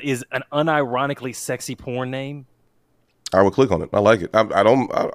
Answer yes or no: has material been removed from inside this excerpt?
no